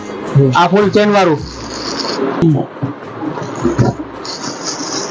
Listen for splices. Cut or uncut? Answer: cut